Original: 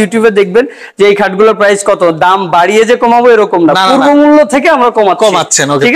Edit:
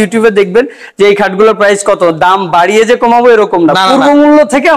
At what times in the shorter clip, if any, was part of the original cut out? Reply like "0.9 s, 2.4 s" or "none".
none